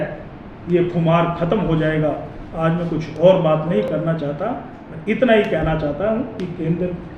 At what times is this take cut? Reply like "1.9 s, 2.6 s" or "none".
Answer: none